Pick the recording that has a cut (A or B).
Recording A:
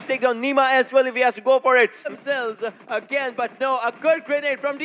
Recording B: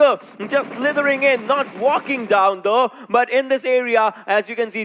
A